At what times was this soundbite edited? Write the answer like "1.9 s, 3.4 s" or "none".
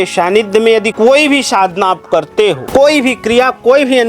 0.9 s, 2.6 s